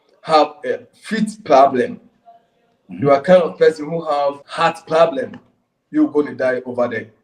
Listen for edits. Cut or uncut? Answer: cut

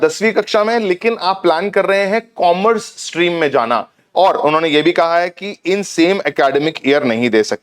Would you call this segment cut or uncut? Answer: cut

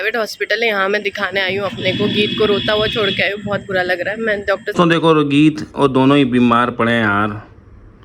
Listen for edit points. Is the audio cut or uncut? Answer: cut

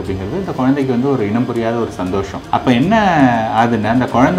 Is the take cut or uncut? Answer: cut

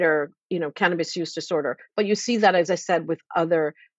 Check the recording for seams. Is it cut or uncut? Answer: uncut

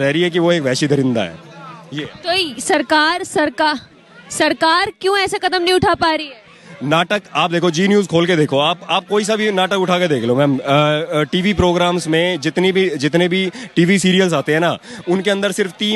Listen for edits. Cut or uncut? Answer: uncut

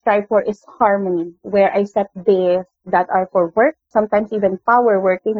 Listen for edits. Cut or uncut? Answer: cut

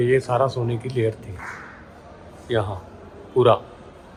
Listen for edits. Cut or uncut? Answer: uncut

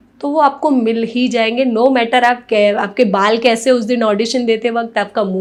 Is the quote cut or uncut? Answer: uncut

